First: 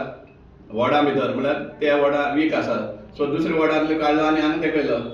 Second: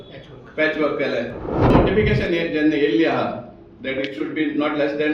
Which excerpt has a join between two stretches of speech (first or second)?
second